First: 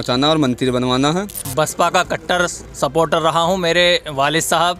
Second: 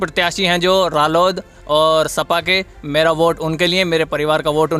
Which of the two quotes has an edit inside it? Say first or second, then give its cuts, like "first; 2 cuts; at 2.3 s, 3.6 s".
first; 1 cut; at 1.4 s